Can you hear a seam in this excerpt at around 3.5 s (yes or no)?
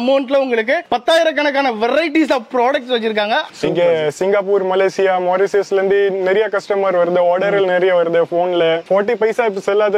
yes